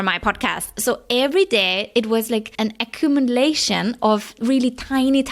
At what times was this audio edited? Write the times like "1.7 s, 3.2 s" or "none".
2.5 s, 4.4 s